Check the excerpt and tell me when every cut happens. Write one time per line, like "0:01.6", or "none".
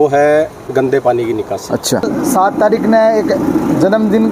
0:02.1